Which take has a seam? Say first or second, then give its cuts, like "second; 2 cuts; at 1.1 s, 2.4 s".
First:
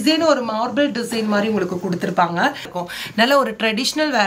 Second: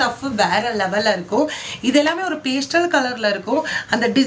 first; 1 cut; at 2.7 s